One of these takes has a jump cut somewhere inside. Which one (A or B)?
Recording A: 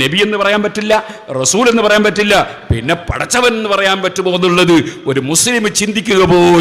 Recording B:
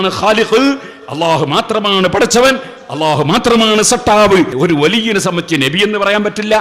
B